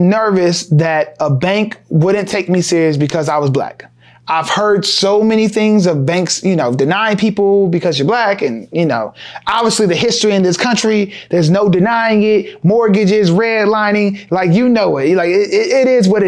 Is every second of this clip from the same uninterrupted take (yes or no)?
yes